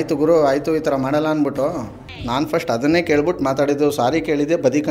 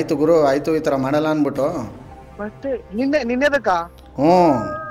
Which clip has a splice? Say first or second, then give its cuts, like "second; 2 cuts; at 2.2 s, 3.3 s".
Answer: first; 1 cut; at 2.1 s